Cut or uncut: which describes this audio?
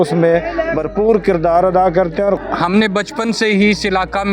cut